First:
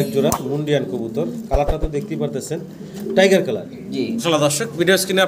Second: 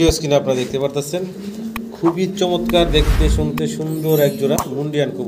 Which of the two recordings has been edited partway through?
first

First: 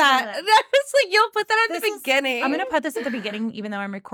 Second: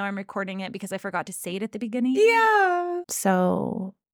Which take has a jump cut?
second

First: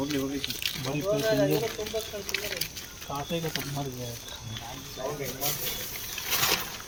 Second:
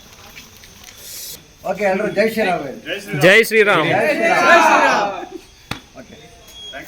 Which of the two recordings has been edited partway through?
second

